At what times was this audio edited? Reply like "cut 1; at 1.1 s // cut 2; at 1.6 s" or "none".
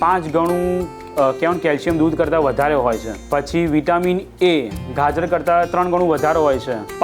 cut 1; at 3.1 s